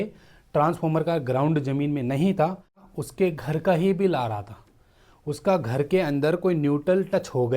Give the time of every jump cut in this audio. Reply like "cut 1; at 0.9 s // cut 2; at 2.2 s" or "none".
cut 1; at 2.8 s